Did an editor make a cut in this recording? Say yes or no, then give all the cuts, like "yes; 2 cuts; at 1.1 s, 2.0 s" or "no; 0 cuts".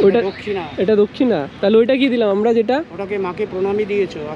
no; 0 cuts